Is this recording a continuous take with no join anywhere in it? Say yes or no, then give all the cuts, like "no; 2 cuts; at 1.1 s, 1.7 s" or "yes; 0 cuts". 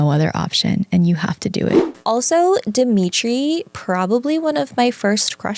no; 1 cut; at 1.9 s